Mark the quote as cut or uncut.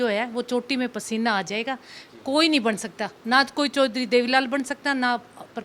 uncut